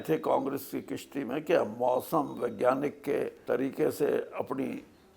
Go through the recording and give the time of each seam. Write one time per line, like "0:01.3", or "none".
0:03.4